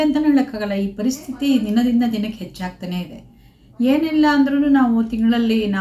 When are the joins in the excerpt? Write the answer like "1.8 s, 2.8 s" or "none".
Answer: none